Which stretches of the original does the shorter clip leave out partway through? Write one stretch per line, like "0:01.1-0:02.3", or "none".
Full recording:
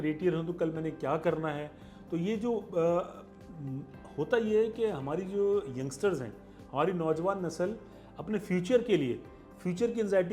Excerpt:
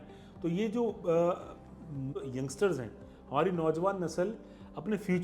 0:04.0-0:05.7